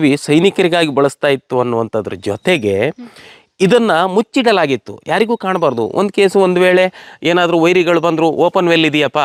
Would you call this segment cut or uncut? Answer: uncut